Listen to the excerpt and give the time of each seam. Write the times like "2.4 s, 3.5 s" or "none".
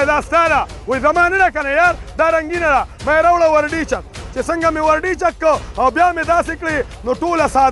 none